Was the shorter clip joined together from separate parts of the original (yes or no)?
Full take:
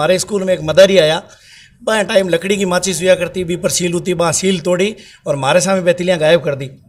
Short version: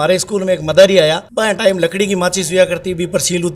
yes